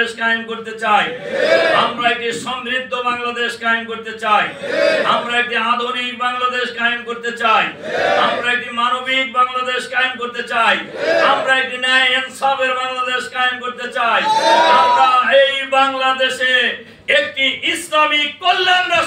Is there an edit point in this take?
no; 0 cuts

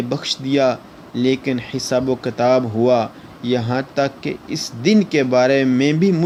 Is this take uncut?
yes; 0 cuts

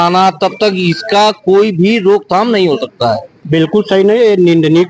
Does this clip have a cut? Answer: yes; 1 cut; at 3.3 s

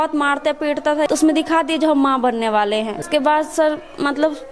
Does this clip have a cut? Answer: yes; 2 cuts; at 1.1 s, 3.1 s

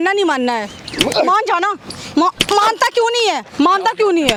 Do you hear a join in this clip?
no; 0 cuts

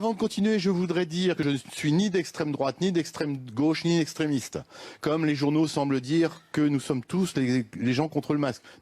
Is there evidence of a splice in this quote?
yes; 1 cut; at 1.4 s

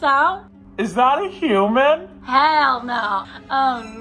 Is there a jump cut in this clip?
yes; 1 cut; at 2.1 s

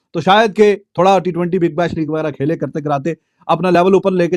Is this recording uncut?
yes; 0 cuts

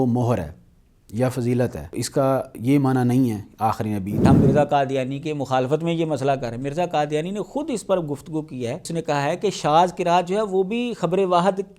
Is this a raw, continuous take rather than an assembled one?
no; 3 cuts; at 2.0 s, 4.2 s, 8.9 s

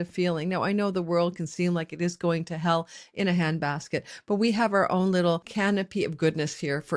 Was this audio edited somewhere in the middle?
yes; 1 cut; at 5.5 s

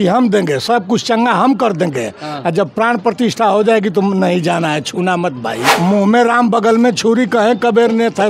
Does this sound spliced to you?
yes; 1 cut; at 5.6 s

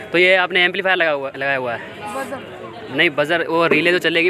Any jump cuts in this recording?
no; 0 cuts

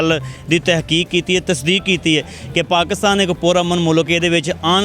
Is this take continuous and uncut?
yes; 0 cuts

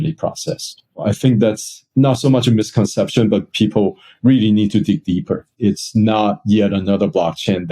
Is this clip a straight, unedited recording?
no; 2 cuts; at 1.0 s, 5.5 s

